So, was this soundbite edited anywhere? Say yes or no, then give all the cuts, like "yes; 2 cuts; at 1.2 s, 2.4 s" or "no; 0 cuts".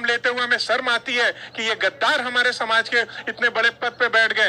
no; 0 cuts